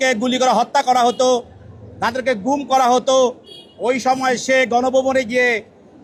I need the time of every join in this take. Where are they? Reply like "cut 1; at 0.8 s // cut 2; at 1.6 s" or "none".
none